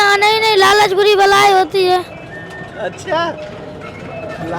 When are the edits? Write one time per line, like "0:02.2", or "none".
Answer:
none